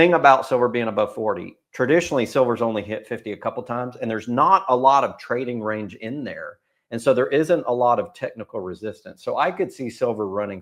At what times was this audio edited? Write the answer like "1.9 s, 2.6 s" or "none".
none